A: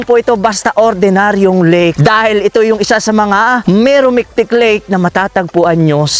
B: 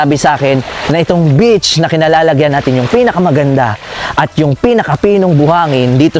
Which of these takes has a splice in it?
A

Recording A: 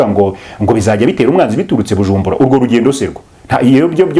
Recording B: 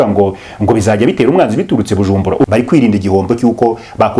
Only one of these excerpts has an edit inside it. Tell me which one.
B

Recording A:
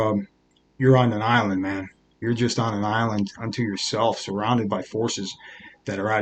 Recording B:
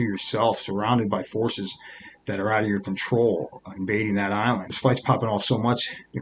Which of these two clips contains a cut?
B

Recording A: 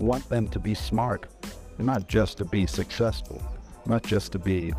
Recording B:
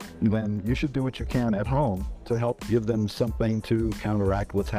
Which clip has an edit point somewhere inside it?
B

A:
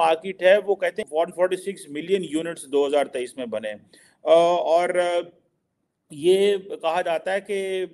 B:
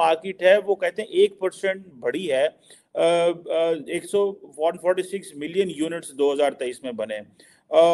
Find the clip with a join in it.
A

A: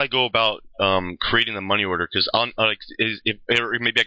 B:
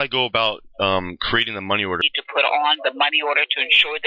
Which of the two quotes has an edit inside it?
B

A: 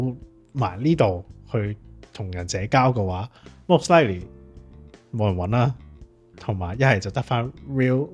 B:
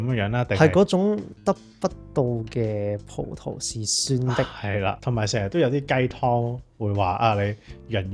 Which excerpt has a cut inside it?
B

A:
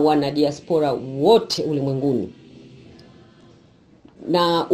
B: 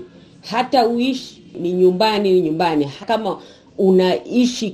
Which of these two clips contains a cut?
B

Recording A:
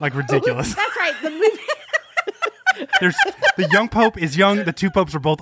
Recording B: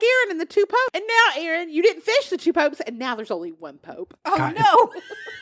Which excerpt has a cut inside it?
B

